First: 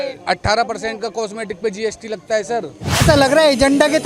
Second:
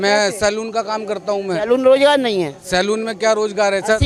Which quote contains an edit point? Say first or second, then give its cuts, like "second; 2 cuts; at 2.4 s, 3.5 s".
first; 1 cut; at 3.0 s